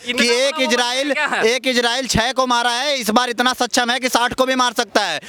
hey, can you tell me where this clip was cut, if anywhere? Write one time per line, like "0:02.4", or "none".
none